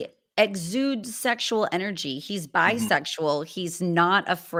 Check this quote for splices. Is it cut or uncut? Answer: uncut